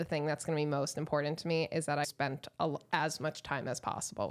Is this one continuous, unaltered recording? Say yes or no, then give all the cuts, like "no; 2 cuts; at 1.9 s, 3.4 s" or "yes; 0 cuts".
no; 1 cut; at 2.1 s